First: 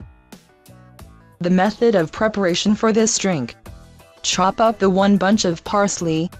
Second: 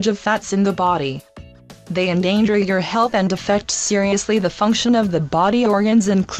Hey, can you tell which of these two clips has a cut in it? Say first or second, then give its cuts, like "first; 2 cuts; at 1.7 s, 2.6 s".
second; 1 cut; at 2.6 s